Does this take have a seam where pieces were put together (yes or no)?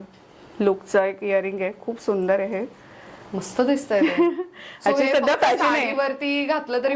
no